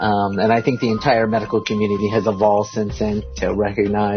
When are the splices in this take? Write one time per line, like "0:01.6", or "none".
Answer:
0:03.3